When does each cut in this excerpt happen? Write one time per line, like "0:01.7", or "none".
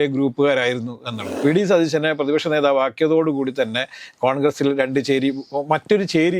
0:01.2